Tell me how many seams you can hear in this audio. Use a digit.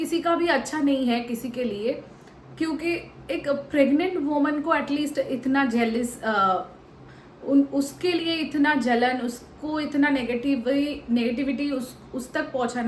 0